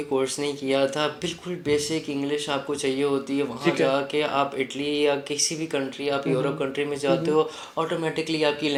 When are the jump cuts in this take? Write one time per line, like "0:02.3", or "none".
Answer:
none

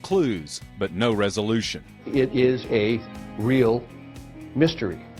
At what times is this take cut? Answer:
0:02.0

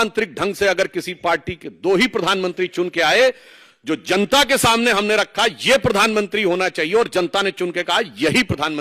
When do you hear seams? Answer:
none

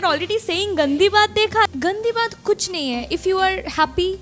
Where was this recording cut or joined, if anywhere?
0:01.7

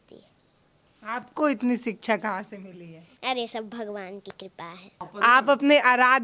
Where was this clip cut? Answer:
0:05.0

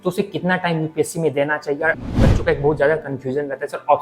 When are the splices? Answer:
0:02.0

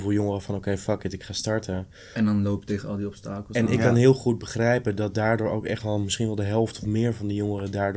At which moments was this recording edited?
none

